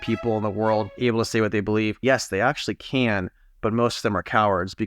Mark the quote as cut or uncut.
cut